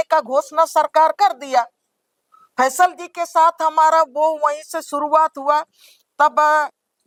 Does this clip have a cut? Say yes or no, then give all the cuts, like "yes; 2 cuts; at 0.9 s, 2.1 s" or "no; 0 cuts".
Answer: no; 0 cuts